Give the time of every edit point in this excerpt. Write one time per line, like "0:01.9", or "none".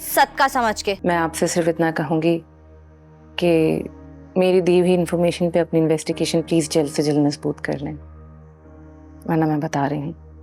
0:01.0